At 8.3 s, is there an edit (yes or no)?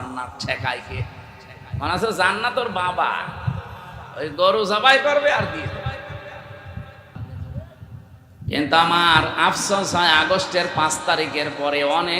no